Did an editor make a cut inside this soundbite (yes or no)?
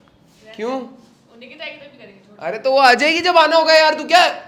no